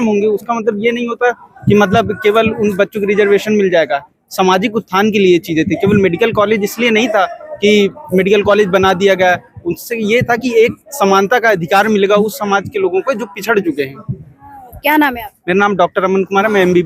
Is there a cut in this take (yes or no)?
no